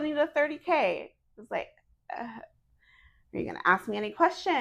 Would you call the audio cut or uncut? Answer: uncut